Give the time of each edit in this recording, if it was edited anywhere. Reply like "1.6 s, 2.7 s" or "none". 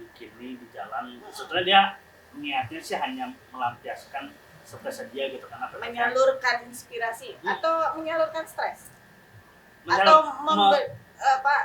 none